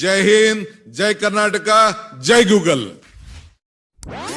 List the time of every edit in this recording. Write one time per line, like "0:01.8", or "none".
0:02.9